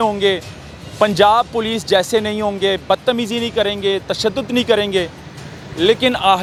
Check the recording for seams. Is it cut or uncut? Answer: uncut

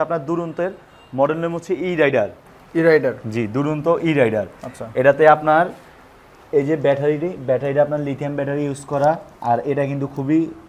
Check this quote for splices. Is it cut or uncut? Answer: uncut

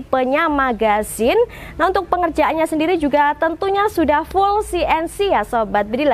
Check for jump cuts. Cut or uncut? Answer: uncut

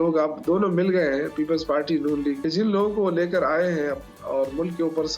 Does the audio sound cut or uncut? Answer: cut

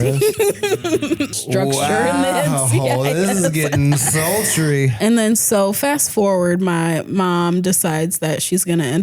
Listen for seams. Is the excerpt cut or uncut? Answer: cut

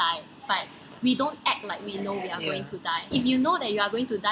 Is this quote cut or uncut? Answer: cut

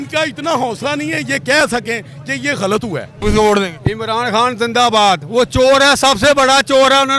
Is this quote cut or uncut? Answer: cut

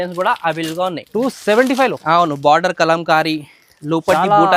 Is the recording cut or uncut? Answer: uncut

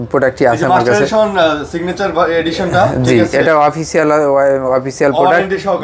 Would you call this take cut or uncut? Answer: uncut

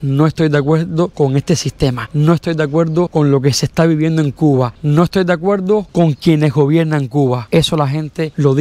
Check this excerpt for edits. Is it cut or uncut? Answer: uncut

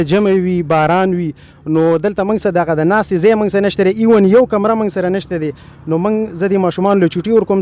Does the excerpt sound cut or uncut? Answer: uncut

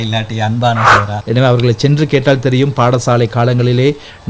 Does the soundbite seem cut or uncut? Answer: cut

